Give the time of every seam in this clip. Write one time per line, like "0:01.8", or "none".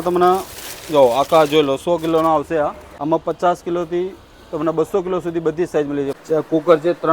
0:02.9
0:06.2